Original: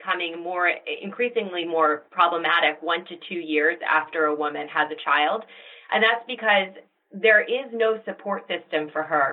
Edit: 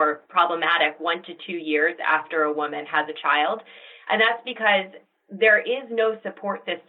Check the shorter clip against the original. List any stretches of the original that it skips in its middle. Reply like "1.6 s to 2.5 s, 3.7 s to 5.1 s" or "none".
none